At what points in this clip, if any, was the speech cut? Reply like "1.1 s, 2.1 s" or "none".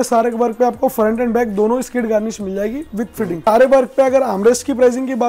3.5 s